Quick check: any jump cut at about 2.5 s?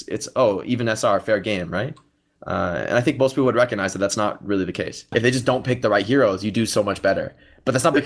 no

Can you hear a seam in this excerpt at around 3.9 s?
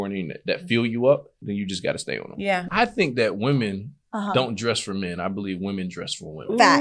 no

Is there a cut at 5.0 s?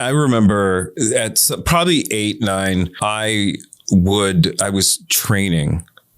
no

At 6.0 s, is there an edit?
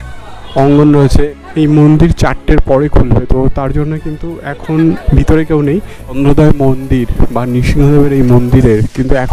yes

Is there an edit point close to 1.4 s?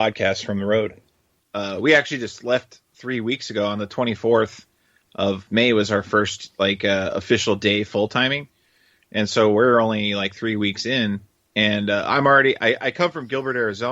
yes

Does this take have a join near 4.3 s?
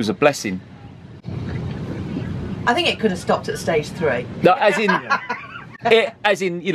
no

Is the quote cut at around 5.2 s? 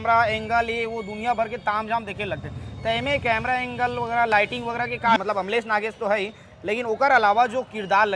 yes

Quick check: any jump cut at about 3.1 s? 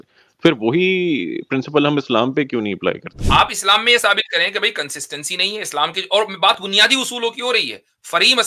yes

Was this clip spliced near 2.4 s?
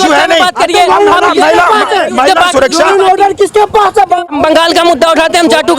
no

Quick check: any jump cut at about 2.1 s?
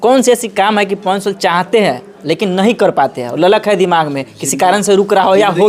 no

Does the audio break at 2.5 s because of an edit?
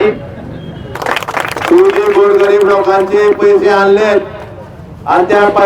no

